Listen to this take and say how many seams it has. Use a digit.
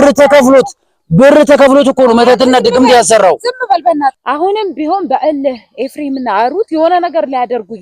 1